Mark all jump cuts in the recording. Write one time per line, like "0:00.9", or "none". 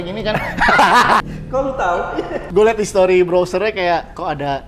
0:01.2
0:02.4